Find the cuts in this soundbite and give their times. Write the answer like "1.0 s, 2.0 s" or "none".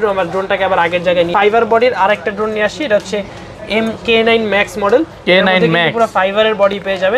1.3 s